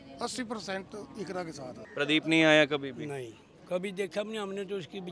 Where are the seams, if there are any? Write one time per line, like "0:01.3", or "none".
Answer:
0:01.8